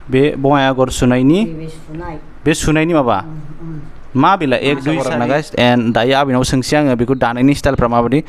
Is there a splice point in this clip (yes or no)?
yes